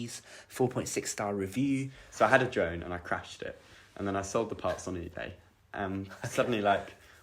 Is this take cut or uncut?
cut